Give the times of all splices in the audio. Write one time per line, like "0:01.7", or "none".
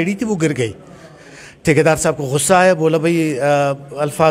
none